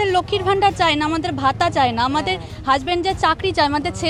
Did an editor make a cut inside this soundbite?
no; 0 cuts

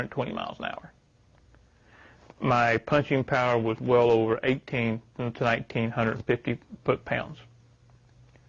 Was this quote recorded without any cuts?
yes; 0 cuts

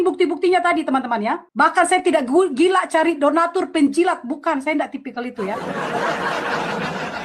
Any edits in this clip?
yes; 1 cut; at 1.5 s

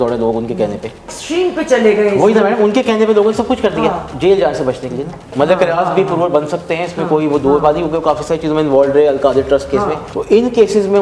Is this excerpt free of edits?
no; 4 cuts; at 1.1 s, 4.1 s, 5.3 s, 10.1 s

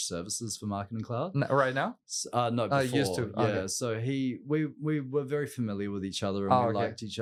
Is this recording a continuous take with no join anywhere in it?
yes; 0 cuts

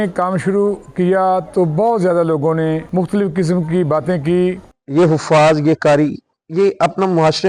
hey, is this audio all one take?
no; 2 cuts; at 2.8 s, 4.7 s

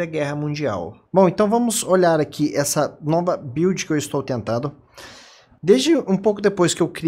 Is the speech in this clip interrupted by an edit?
yes; 1 cut; at 4.2 s

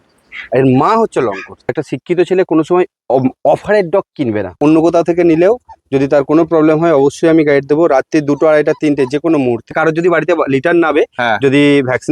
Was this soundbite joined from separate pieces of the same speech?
yes; 3 cuts; at 1.7 s, 4.5 s, 9.7 s

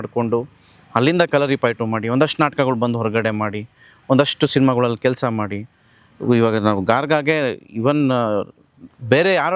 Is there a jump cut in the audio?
no; 0 cuts

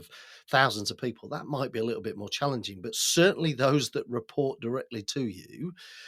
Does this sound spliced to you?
no; 0 cuts

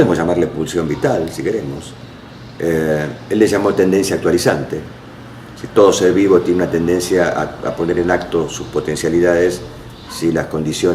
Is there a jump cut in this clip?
yes; 1 cut; at 4.6 s

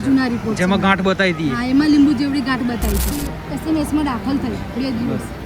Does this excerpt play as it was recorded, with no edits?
no; 1 cut; at 3.1 s

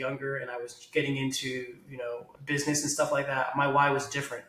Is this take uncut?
no; 1 cut; at 2.3 s

